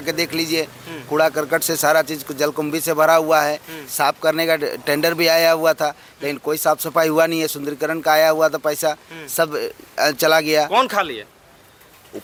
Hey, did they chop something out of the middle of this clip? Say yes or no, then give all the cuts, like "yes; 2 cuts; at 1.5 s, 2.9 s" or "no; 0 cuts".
no; 0 cuts